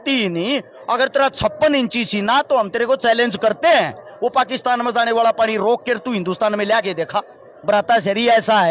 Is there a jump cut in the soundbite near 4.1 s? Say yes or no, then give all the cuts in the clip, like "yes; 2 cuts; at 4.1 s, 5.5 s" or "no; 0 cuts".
no; 1 cut; at 7.5 s